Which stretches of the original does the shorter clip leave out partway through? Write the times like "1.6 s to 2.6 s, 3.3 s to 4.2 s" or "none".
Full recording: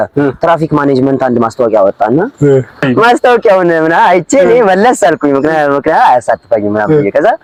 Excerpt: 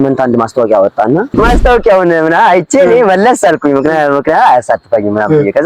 2.3 s to 2.9 s